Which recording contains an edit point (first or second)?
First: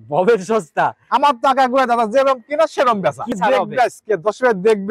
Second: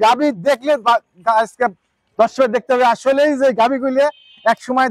first